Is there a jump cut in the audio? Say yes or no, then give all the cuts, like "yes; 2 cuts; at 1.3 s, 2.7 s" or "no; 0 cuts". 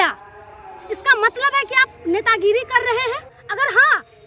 yes; 1 cut; at 3.4 s